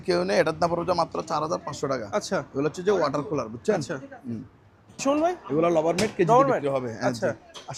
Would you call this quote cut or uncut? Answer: uncut